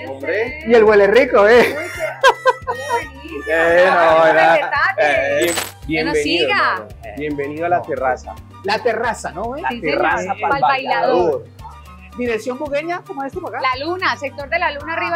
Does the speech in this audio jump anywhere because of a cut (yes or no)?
no